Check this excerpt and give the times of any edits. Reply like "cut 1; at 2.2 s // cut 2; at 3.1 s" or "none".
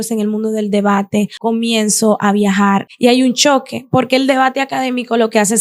cut 1; at 1.3 s // cut 2; at 2.9 s